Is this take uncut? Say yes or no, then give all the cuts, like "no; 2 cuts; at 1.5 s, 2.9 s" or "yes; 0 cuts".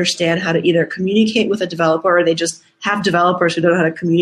yes; 0 cuts